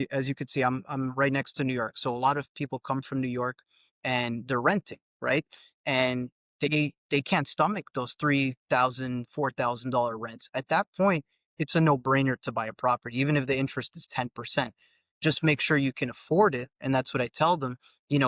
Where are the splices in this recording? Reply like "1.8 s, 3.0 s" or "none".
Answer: 10.4 s